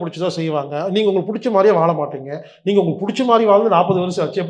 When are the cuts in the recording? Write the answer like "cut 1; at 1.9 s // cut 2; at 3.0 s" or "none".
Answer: none

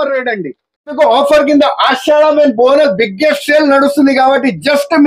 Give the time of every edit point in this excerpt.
cut 1; at 0.9 s

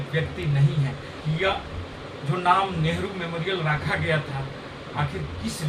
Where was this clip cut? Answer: cut 1; at 1.1 s

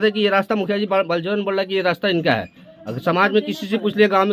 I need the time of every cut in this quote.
none

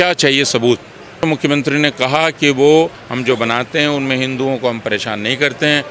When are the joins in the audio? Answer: cut 1; at 1.2 s // cut 2; at 3.1 s

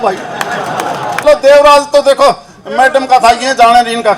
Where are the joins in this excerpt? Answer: cut 1; at 1.2 s

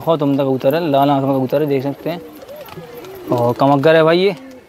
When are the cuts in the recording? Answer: none

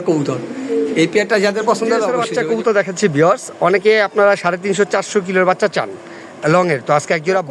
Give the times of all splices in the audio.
cut 1; at 2.1 s

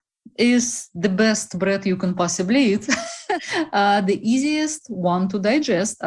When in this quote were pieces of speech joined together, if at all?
cut 1; at 3.2 s

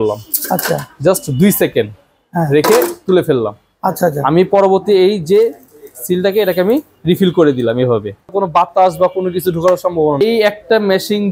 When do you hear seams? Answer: cut 1; at 8.3 s // cut 2; at 10.2 s

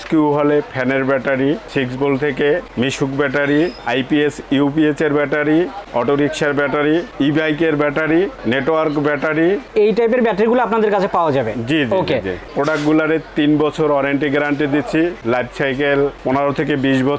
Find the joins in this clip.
none

